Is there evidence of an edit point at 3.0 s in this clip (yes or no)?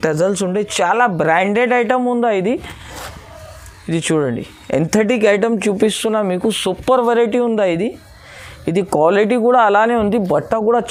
no